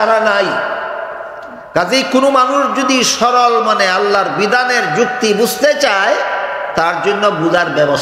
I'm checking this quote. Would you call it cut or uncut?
uncut